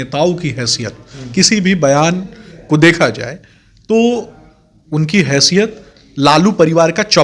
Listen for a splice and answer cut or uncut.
uncut